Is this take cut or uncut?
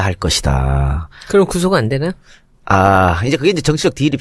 uncut